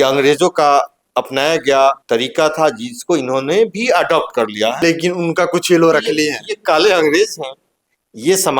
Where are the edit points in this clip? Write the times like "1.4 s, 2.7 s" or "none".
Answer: 1.0 s, 2.0 s, 4.8 s